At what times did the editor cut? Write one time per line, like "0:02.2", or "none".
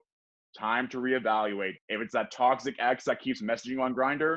0:01.8